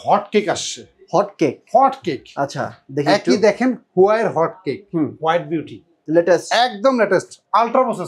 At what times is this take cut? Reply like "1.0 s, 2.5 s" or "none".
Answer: 5.9 s

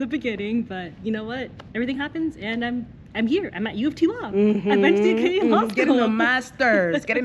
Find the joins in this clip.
1.6 s

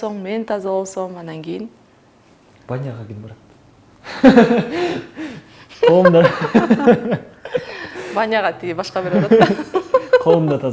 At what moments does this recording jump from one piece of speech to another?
none

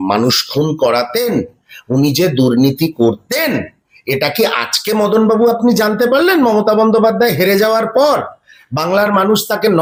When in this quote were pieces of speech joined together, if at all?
none

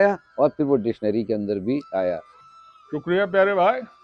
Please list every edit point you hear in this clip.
2.3 s

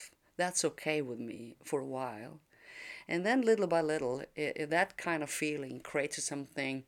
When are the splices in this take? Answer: none

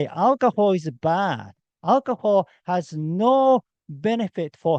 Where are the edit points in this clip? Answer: none

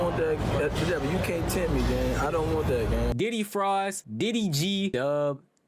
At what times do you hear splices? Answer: 3.1 s

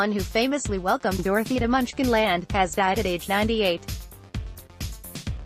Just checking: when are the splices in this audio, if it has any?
3.8 s

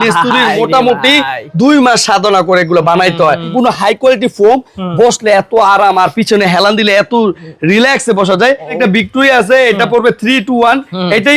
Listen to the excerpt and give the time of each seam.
3.5 s, 8.8 s

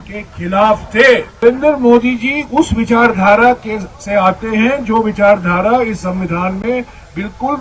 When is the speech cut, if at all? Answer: 1.4 s

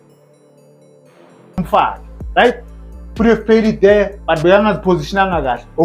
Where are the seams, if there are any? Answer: 1.6 s

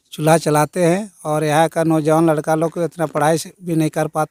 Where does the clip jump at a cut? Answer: none

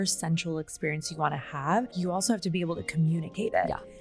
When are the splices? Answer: 1.9 s

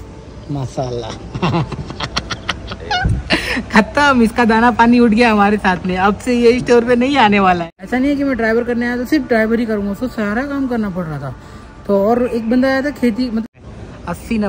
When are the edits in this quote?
7.7 s, 13.4 s

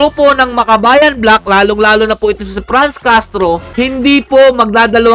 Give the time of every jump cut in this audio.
3.7 s

